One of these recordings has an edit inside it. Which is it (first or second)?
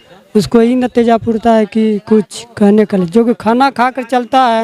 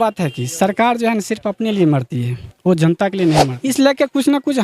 second